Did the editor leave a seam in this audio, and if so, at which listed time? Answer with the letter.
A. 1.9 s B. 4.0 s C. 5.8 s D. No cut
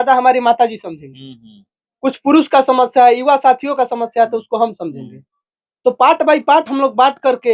D